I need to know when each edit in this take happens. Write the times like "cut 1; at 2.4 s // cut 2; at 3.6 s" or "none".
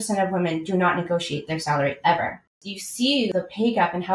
cut 1; at 2.9 s